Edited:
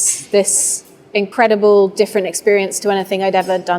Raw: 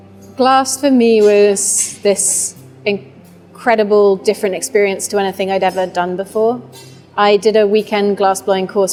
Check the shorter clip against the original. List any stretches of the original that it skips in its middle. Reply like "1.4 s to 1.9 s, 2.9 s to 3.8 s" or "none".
3.0 s to 3.6 s

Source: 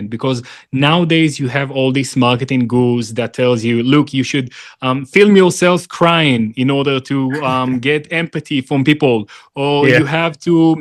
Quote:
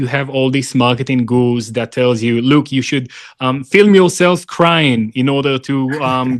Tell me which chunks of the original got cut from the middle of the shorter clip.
none

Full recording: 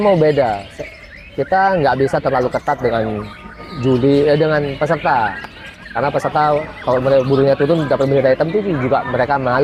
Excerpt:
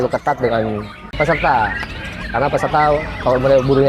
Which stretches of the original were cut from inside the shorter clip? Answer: 3.5 s to 4.7 s

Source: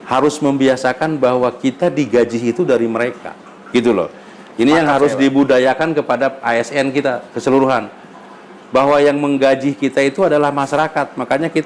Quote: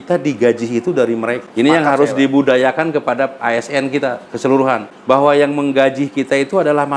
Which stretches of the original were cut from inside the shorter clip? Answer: 3.2 s to 4.5 s, 7.9 s to 8.6 s

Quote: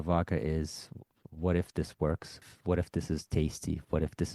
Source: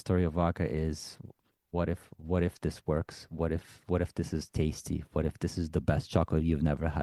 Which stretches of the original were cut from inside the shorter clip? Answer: 1.5 s to 2.1 s, 3.3 s to 3.7 s

